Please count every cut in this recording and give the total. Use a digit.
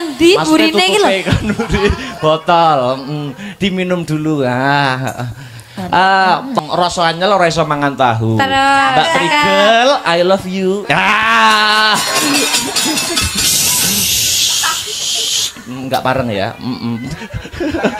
1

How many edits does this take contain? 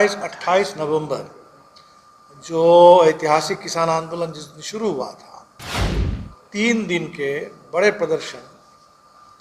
0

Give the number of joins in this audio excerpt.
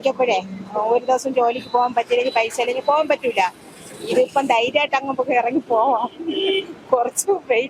0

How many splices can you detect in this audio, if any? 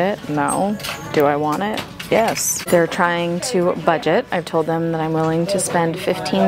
1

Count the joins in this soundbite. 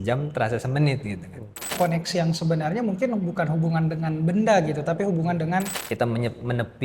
2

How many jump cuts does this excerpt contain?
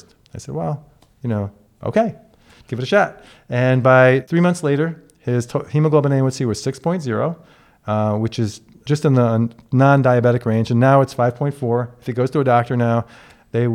2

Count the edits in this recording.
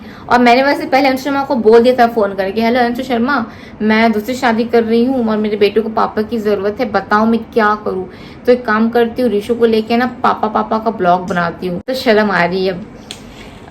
1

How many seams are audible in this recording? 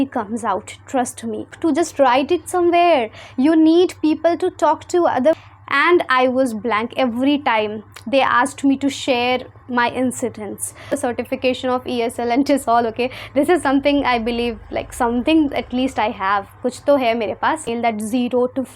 4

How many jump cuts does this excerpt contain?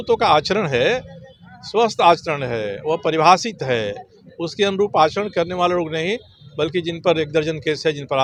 0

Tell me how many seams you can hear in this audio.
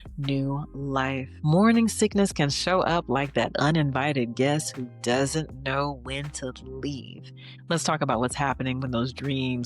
2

